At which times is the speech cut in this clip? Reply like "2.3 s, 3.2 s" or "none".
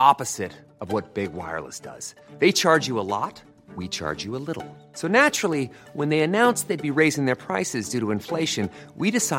none